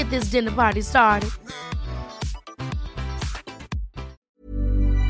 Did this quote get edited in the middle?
yes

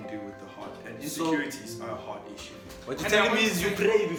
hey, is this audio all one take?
yes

